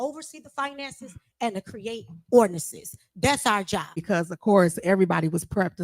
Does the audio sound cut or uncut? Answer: cut